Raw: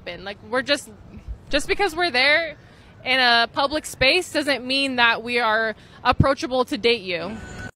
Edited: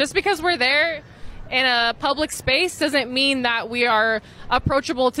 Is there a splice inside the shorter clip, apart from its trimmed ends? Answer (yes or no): no